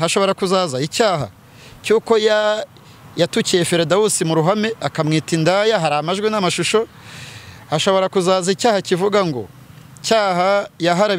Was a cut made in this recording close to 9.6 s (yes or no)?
no